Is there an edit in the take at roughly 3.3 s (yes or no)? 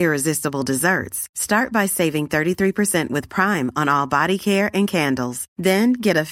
no